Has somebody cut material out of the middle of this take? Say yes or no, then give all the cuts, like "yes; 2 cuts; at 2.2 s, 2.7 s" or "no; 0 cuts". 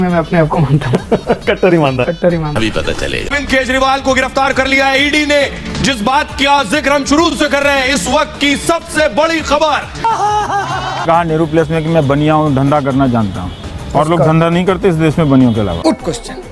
yes; 1 cut; at 11.0 s